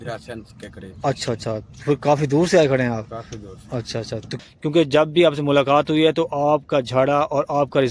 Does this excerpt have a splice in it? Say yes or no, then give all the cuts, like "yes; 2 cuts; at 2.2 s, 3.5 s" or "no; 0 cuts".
yes; 1 cut; at 4.3 s